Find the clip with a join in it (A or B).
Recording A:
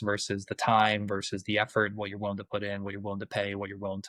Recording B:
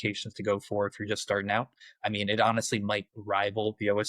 B